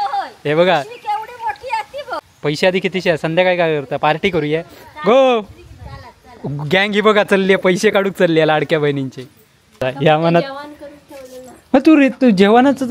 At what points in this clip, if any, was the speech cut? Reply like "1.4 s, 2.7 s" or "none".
2.2 s, 9.8 s